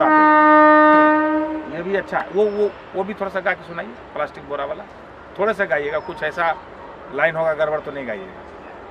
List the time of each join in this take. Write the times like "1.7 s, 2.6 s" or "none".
none